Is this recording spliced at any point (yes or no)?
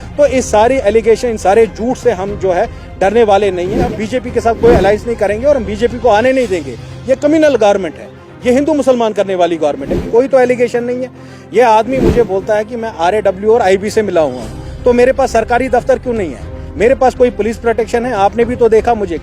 yes